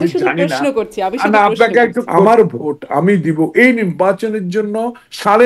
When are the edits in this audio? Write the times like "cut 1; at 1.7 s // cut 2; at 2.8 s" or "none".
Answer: cut 1; at 2.1 s